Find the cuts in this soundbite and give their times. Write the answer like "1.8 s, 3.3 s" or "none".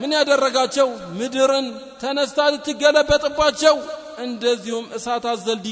none